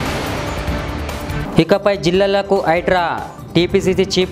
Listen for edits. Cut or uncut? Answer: cut